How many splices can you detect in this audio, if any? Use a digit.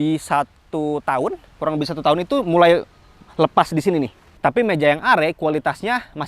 1